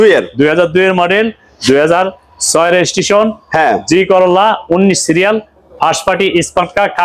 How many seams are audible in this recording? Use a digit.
0